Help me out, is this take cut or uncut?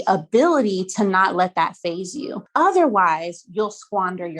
cut